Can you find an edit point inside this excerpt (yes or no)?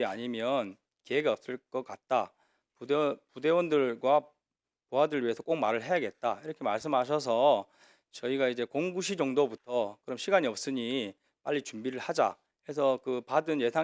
no